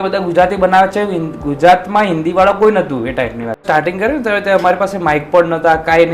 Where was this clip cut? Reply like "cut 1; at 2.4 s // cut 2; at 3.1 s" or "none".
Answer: cut 1; at 3.6 s